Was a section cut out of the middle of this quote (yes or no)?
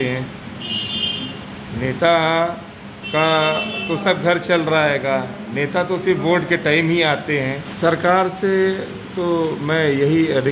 yes